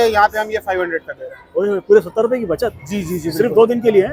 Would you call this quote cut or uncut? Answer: uncut